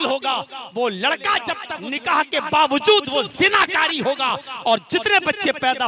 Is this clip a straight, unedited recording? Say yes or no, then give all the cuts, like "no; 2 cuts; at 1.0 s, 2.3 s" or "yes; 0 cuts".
no; 1 cut; at 1.7 s